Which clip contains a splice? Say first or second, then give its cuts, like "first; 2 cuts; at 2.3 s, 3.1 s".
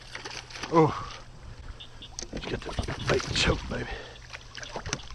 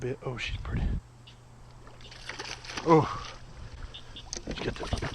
second; 1 cut; at 1.0 s